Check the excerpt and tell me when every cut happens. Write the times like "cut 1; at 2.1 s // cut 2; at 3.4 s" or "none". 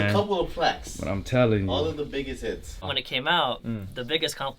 cut 1; at 2.9 s